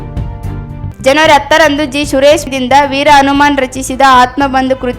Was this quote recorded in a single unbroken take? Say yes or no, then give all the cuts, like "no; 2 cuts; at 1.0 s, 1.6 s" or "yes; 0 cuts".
no; 1 cut; at 0.9 s